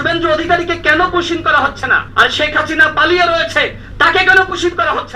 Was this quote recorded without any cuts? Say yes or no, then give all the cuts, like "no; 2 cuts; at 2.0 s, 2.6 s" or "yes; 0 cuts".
no; 1 cut; at 2.0 s